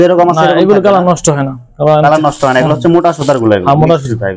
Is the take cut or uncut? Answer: uncut